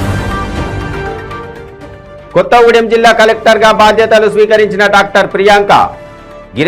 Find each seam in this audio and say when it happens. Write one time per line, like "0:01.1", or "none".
0:02.1